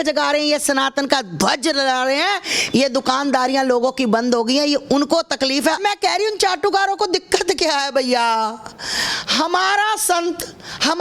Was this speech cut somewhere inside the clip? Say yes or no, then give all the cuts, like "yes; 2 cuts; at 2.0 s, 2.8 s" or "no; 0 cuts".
yes; 1 cut; at 5.8 s